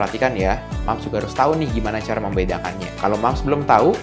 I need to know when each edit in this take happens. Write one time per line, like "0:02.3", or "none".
none